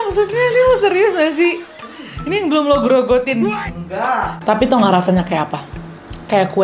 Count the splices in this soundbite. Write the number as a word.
one